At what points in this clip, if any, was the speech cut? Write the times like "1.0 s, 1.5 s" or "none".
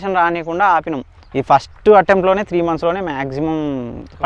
1.2 s